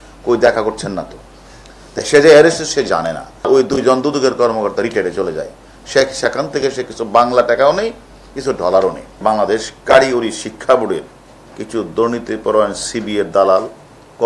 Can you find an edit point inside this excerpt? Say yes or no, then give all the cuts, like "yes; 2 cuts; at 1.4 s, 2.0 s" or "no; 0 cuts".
yes; 2 cuts; at 3.5 s, 9.2 s